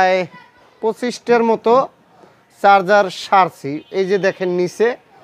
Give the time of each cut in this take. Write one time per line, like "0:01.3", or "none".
none